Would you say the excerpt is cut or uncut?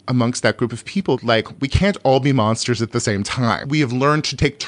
cut